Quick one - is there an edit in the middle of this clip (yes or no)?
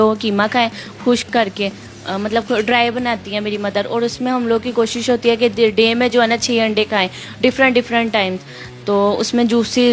no